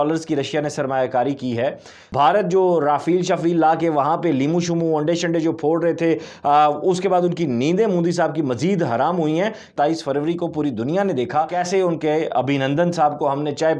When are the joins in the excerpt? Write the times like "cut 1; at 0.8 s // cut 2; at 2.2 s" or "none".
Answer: cut 1; at 2.0 s // cut 2; at 9.7 s // cut 3; at 11.6 s